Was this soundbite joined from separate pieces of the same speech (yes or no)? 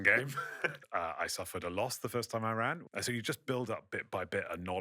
yes